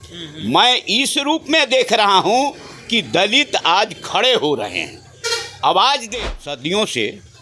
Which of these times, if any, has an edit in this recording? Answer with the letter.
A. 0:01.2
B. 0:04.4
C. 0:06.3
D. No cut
C